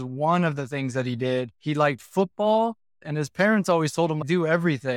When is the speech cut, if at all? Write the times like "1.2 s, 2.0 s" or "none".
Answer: 1.5 s, 3.0 s